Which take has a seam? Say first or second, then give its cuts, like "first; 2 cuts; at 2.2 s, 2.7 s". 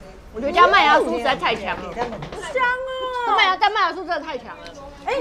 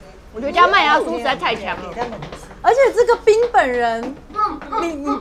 second; 1 cut; at 2.3 s